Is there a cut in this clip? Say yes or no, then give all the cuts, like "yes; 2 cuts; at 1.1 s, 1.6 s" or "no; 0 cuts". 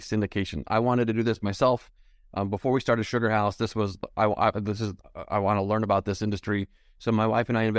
no; 0 cuts